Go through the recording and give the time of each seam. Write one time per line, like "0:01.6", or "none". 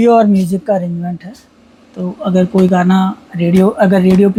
none